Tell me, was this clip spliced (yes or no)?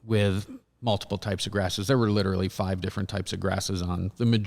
no